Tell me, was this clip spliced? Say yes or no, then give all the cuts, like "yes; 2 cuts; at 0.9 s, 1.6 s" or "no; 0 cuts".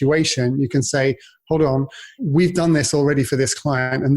yes; 1 cut; at 2.2 s